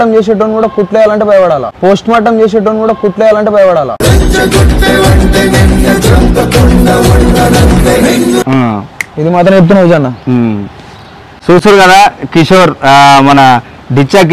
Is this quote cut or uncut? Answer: uncut